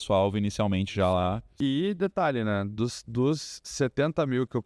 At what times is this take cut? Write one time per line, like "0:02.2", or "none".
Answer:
0:01.5